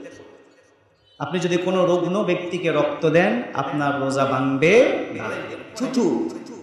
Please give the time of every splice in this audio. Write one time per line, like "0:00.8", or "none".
0:05.6